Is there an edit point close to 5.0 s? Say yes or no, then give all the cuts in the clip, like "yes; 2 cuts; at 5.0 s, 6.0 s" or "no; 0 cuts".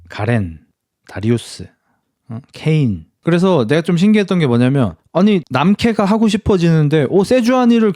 no; 1 cut; at 3.1 s